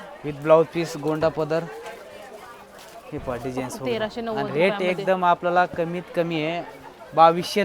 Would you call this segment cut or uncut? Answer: uncut